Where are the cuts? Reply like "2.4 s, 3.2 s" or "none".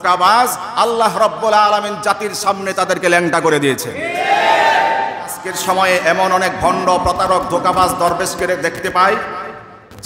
5.5 s